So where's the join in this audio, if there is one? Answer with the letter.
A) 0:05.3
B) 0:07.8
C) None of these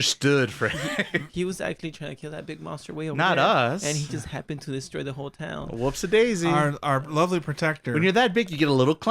C